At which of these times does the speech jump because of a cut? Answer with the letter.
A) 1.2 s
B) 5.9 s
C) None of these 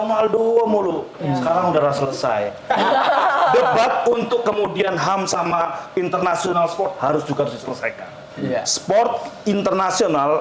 C